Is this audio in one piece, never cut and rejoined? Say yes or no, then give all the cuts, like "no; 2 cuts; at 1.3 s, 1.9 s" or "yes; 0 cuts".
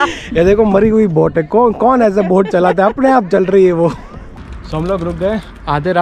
no; 1 cut; at 4.5 s